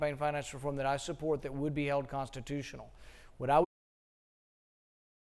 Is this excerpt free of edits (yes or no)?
yes